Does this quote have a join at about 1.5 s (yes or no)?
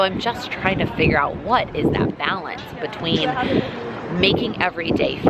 no